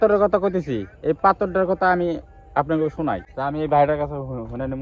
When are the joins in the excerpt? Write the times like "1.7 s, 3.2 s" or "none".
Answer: 3.3 s